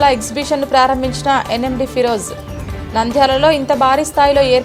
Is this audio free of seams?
yes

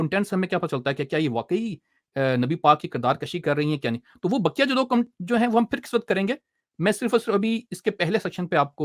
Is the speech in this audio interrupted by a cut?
no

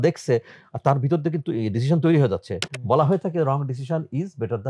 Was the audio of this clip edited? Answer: no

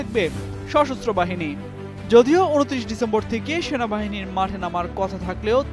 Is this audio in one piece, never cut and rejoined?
yes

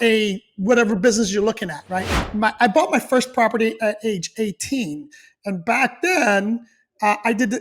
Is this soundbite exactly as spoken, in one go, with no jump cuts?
no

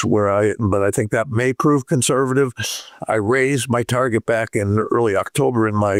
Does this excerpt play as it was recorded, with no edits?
yes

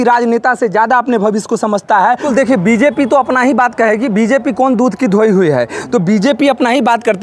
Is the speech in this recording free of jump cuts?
no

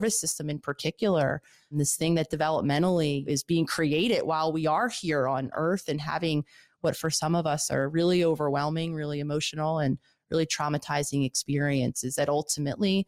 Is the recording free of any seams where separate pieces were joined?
no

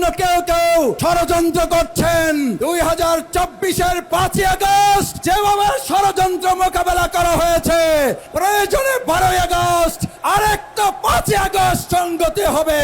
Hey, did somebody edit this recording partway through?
yes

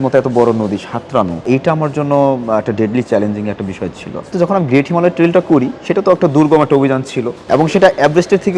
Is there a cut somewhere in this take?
yes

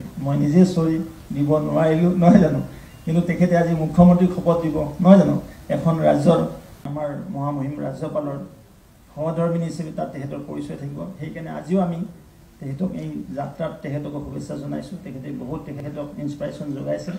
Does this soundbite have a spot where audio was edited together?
yes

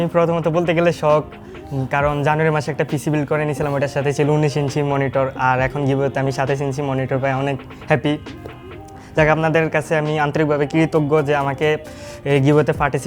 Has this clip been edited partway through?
no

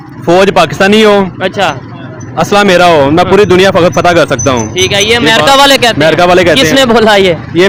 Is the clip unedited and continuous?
yes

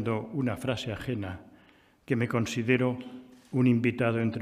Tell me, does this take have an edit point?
no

